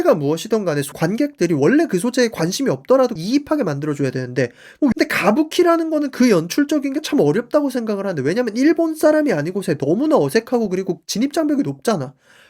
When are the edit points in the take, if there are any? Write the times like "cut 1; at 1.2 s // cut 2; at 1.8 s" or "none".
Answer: cut 1; at 0.9 s // cut 2; at 3.2 s // cut 3; at 4.9 s